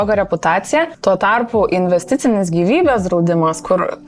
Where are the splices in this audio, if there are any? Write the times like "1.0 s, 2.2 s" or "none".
0.9 s